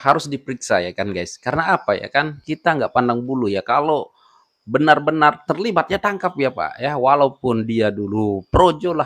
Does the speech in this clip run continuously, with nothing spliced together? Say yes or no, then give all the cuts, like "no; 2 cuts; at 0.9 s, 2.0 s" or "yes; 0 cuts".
yes; 0 cuts